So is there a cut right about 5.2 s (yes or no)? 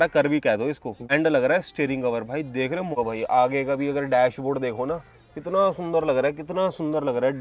no